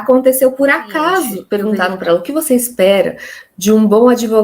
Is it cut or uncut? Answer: cut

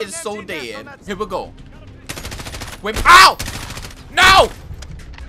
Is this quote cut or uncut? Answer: cut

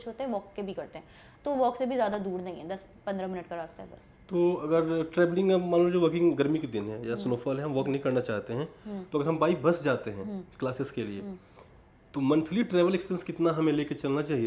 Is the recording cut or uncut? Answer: uncut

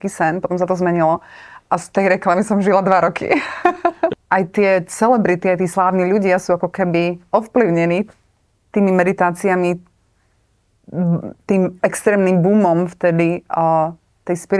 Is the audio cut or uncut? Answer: cut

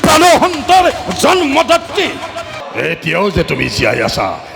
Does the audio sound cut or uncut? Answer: cut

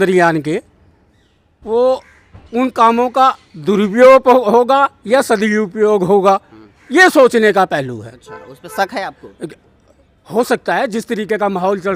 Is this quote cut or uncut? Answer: uncut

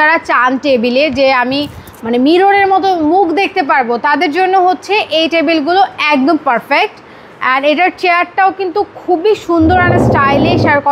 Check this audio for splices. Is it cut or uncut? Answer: uncut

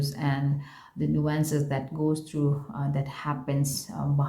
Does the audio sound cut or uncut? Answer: uncut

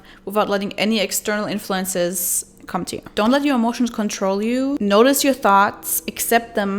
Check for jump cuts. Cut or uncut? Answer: cut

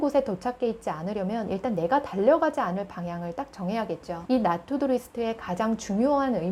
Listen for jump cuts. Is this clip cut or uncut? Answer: uncut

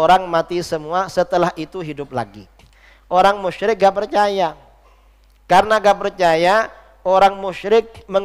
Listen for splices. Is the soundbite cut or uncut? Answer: uncut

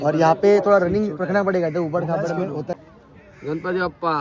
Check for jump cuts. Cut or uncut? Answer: cut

